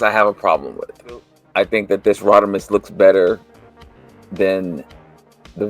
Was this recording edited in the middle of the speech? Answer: yes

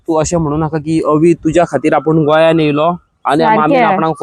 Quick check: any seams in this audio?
no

